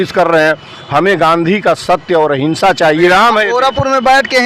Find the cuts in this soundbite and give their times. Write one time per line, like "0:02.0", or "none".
0:03.1